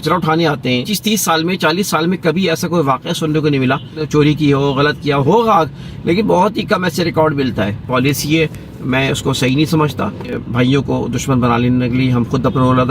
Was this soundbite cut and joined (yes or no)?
yes